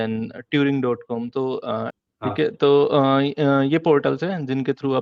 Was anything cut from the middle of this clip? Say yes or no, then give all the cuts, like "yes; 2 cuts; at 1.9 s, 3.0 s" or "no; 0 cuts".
no; 0 cuts